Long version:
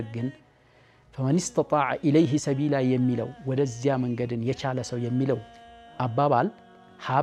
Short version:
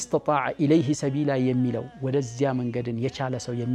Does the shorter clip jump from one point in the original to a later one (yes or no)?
no